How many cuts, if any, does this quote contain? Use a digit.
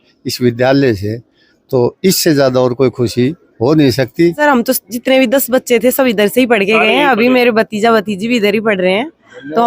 1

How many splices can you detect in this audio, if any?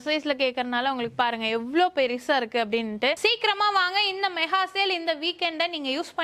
1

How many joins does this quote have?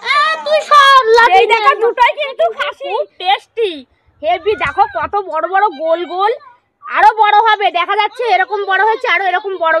1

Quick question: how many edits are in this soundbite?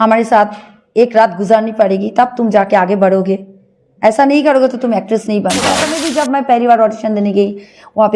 1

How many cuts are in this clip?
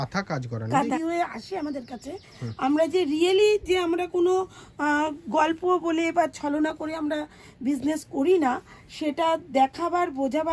1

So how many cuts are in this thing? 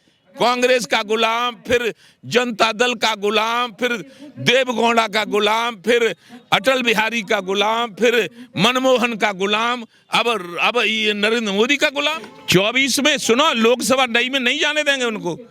1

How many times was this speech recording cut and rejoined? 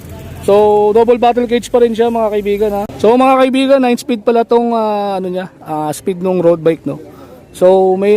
1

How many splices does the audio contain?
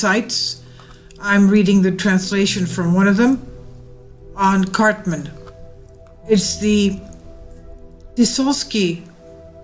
1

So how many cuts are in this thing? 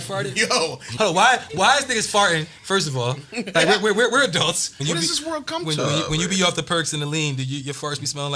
2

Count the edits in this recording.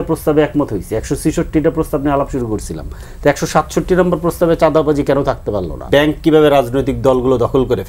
1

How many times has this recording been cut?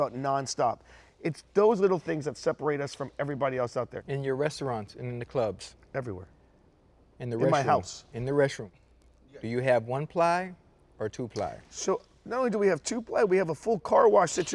1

